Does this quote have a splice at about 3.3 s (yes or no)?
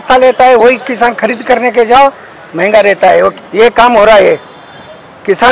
yes